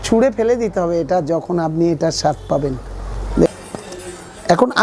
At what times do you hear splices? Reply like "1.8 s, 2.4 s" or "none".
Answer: 3.5 s